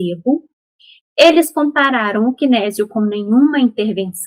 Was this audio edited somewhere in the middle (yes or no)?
no